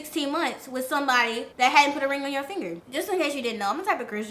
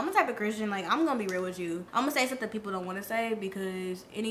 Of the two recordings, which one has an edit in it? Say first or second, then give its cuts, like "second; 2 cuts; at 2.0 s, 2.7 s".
first; 2 cuts; at 1.5 s, 2.7 s